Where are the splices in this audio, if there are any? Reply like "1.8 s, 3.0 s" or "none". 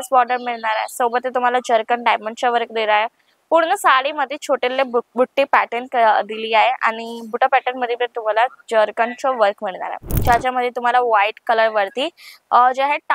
10.1 s